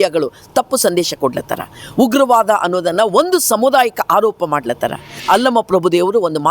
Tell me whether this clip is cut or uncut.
cut